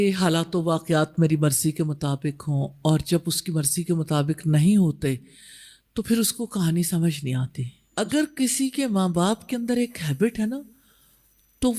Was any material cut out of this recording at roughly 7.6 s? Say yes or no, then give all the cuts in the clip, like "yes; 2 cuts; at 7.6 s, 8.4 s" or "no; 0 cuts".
yes; 1 cut; at 7.6 s